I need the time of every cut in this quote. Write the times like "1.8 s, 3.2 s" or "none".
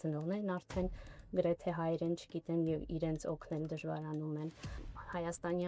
4.8 s